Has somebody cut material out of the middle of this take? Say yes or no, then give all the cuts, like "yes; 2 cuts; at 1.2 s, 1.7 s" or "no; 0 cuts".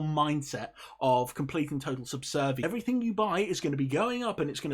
yes; 1 cut; at 2.6 s